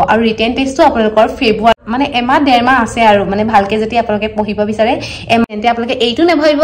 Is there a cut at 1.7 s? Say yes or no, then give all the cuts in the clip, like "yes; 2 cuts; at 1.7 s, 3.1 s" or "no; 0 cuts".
yes; 2 cuts; at 1.7 s, 5.4 s